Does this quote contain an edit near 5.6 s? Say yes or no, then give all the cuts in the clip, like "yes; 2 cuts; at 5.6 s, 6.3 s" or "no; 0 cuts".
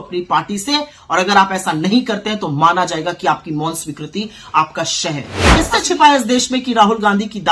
yes; 1 cut; at 5.6 s